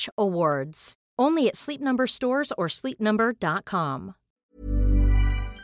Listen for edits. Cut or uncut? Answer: cut